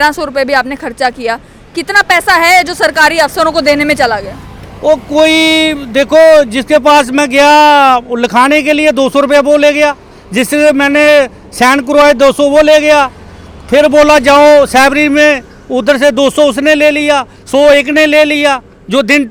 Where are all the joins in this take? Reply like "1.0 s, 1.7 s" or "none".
none